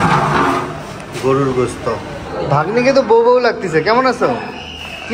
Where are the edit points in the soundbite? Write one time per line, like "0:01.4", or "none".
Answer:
0:02.4